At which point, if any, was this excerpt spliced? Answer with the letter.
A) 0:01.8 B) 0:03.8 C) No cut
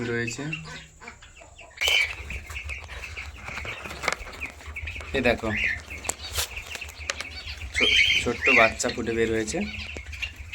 A